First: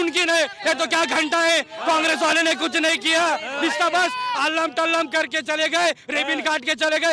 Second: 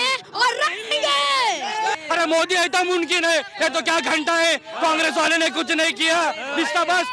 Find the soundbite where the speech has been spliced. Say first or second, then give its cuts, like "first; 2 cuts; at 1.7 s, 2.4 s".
second; 1 cut; at 2.0 s